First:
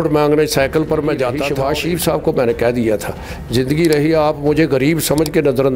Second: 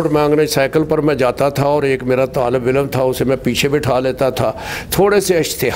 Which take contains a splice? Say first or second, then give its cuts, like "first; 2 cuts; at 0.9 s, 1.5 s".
first; 1 cut; at 1.5 s